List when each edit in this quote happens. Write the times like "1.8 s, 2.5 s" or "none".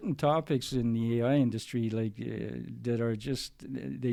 none